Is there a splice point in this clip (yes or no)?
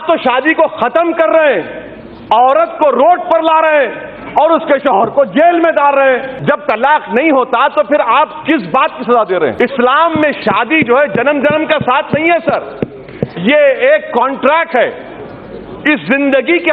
yes